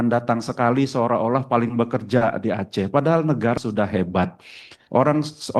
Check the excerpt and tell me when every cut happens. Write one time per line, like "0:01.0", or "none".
0:03.6